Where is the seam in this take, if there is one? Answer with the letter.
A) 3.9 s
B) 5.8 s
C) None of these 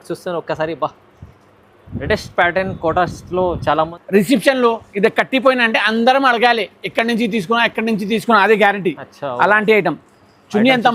A